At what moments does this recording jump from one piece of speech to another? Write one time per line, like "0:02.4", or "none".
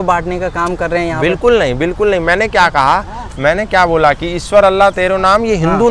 none